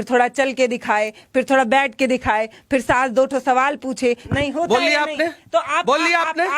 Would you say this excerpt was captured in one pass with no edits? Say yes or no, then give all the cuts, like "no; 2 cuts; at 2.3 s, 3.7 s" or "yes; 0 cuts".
no; 1 cut; at 4.2 s